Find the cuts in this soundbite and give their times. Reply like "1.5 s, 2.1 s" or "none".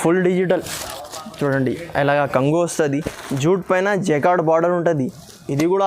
3.1 s

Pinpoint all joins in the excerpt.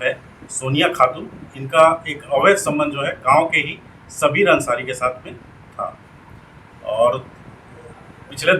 none

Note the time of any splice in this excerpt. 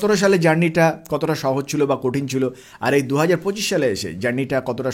none

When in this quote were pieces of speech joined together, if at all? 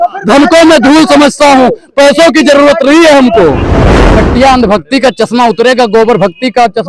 4.1 s

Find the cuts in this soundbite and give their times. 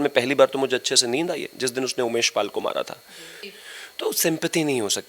3.4 s

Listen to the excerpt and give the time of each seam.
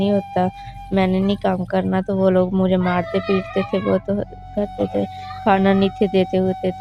none

